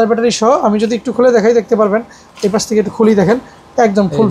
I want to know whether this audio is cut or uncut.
uncut